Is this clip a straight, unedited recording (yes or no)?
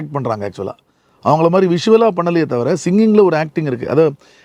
yes